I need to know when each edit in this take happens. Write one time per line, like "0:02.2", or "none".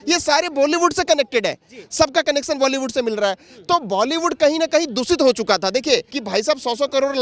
0:06.1